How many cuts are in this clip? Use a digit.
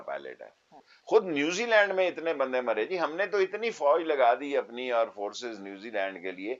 1